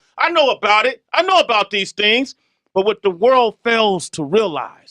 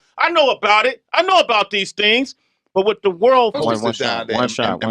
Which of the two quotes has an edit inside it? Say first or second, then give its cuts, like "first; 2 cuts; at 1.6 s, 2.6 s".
first; 1 cut; at 3.6 s